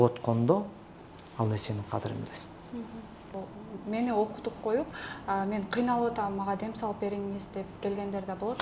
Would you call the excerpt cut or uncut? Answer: uncut